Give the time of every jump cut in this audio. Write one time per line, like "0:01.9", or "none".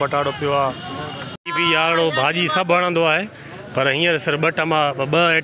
0:01.3